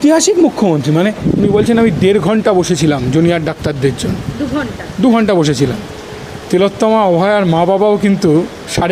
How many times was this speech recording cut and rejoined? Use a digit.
1